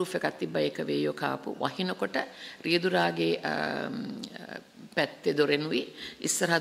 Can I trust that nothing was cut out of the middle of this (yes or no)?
yes